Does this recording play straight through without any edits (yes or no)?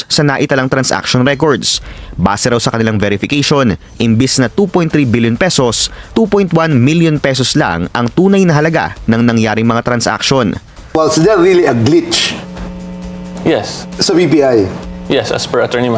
yes